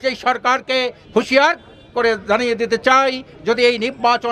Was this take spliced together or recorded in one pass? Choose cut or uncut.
cut